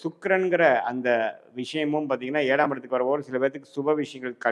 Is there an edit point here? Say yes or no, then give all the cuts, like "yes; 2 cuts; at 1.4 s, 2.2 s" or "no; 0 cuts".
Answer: no; 0 cuts